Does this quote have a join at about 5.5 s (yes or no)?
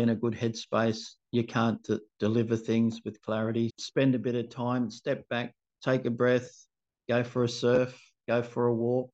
no